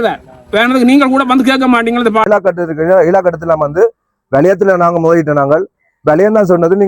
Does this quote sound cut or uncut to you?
cut